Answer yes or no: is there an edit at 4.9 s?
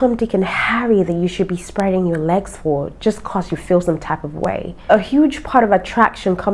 yes